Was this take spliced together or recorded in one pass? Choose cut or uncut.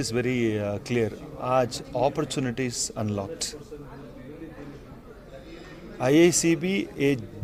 uncut